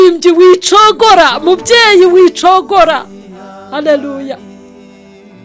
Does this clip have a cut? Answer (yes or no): yes